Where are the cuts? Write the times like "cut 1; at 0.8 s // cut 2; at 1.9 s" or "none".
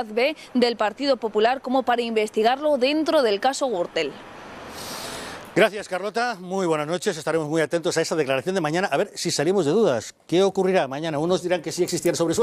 cut 1; at 11.0 s

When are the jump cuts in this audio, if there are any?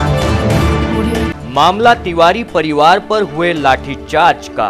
none

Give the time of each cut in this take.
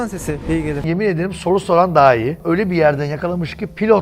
cut 1; at 0.8 s // cut 2; at 2.4 s

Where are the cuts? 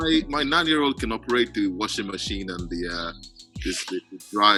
none

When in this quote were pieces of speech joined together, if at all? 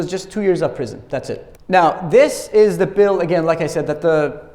cut 1; at 1.5 s

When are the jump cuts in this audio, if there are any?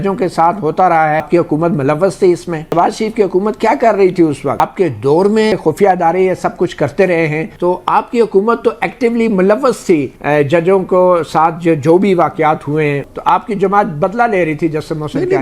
cut 1; at 1.3 s // cut 2; at 2.7 s // cut 3; at 4.6 s // cut 4; at 5.5 s // cut 5; at 7.5 s // cut 6; at 13.1 s

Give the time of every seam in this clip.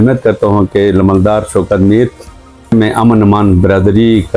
cut 1; at 2.7 s

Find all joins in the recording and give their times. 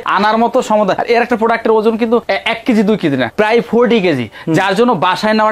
none

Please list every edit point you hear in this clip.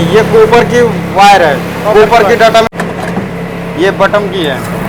cut 1; at 2.7 s

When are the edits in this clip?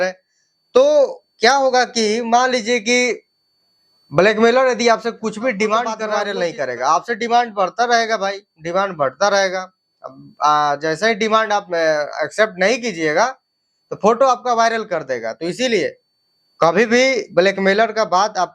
cut 1; at 6.1 s

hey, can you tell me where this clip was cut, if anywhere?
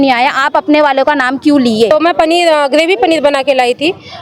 cut 1; at 1.9 s

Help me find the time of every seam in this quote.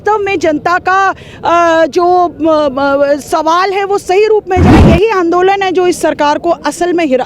cut 1; at 4.8 s

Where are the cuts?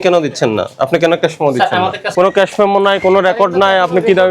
cut 1; at 2.0 s

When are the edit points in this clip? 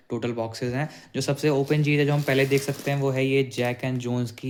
none

